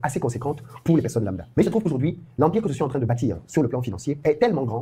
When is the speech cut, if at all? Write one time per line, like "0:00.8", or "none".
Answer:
none